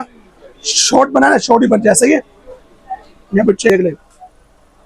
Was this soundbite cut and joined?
yes; 1 cut; at 3.7 s

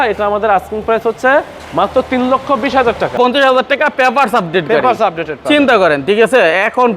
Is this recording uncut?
no; 1 cut; at 3.2 s

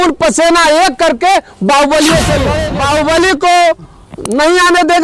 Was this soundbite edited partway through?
yes; 1 cut; at 2.6 s

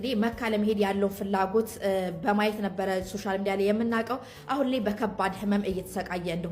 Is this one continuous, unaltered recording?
yes; 0 cuts

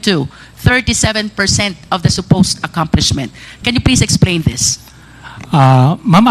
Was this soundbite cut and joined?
no; 0 cuts

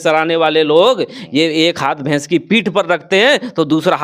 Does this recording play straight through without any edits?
yes; 0 cuts

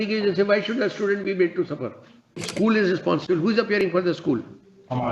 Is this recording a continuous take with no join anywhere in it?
no; 1 cut; at 2.4 s

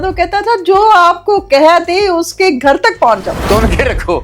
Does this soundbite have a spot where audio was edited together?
no; 0 cuts

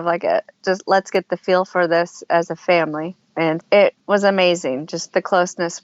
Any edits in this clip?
yes; 1 cut; at 3.6 s

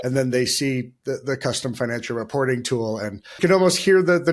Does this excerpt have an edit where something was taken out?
yes; 1 cut; at 3.3 s

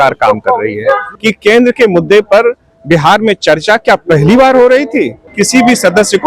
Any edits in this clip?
yes; 2 cuts; at 1.1 s, 5.2 s

